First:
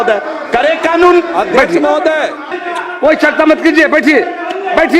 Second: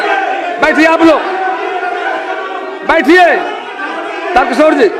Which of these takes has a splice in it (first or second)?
first